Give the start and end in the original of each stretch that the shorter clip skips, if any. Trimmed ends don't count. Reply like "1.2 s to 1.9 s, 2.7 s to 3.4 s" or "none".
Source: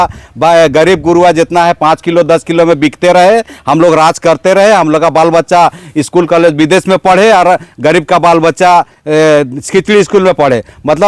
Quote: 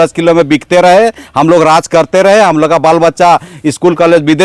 none